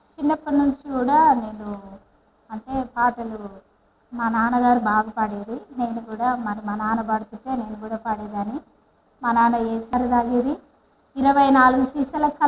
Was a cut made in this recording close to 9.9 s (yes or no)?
yes